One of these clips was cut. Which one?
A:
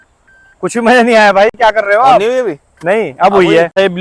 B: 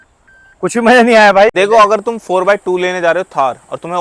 B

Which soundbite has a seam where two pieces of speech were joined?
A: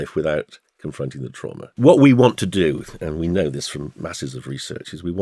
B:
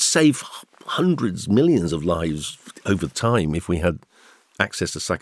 A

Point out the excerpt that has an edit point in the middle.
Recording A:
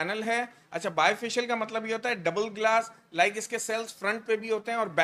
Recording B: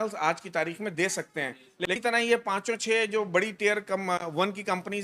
B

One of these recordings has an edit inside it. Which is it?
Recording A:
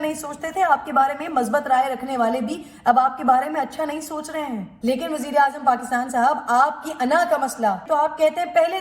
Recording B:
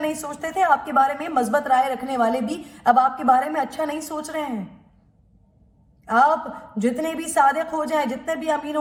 A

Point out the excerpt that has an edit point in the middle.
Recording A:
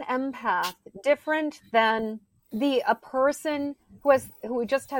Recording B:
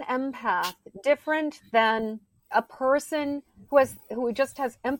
B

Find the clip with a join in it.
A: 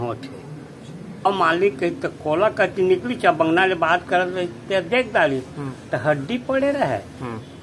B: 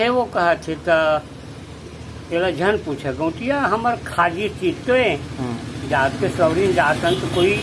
A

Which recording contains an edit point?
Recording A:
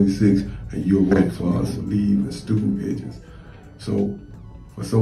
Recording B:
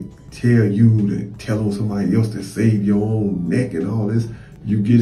A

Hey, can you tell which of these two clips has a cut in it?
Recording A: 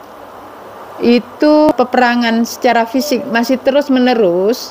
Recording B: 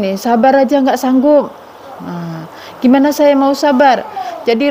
A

